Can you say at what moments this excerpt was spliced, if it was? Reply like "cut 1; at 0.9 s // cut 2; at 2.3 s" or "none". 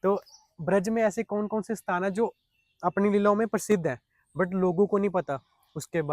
none